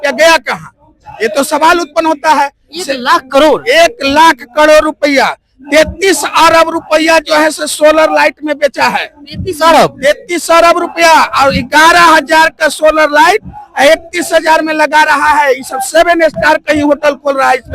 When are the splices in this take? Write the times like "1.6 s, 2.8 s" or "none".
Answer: none